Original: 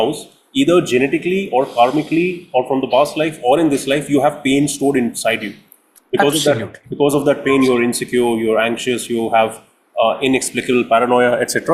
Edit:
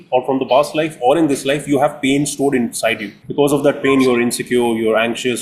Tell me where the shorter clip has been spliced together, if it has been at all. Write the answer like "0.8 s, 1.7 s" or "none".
3.2 s